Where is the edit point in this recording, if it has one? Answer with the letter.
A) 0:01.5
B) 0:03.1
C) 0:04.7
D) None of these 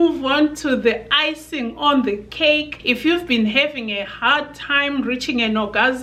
D